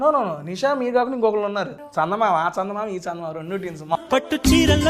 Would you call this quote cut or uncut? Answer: cut